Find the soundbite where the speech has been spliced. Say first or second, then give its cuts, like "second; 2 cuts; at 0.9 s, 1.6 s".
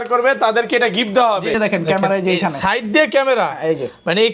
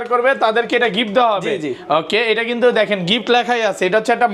first; 1 cut; at 1.5 s